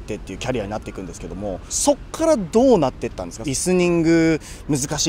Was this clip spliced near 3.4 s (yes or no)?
yes